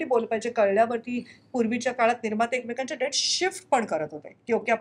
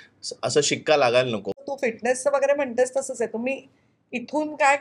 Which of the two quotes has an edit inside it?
second; 1 cut; at 1.6 s

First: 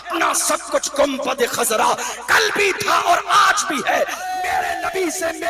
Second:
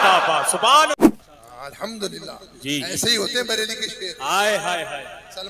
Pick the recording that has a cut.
second; 1 cut; at 1.0 s

